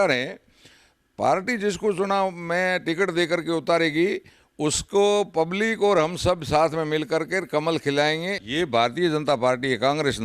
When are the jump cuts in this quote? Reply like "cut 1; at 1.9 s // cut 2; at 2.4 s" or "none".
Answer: cut 1; at 8.4 s